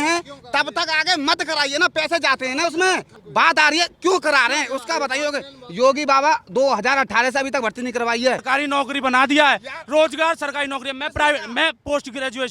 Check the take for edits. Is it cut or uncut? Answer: cut